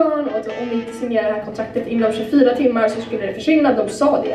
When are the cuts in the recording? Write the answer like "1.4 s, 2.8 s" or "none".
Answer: none